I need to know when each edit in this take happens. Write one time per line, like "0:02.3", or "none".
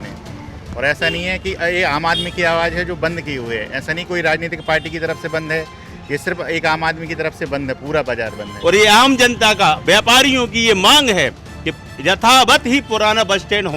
0:08.5